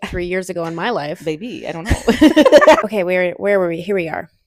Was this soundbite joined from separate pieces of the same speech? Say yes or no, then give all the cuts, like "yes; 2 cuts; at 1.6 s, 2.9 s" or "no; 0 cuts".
no; 0 cuts